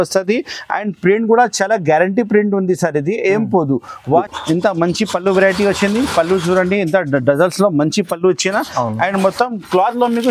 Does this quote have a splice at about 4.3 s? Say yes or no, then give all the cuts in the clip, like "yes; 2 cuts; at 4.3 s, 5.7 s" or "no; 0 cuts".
yes; 1 cut; at 4.3 s